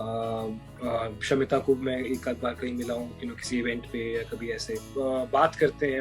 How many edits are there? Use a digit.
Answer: 1